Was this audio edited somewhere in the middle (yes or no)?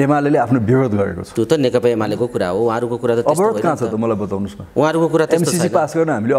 no